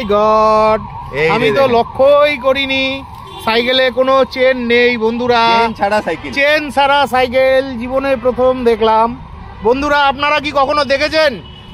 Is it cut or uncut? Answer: uncut